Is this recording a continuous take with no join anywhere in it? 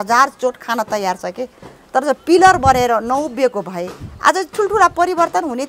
yes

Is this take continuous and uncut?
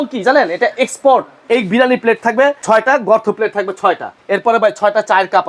no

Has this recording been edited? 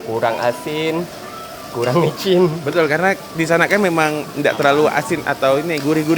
no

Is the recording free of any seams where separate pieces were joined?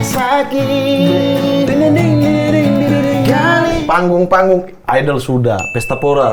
no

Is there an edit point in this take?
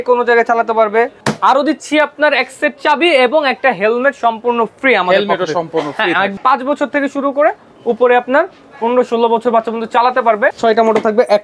yes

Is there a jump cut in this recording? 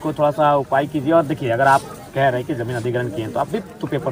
no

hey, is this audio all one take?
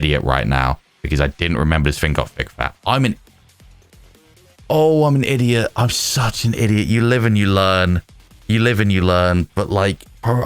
yes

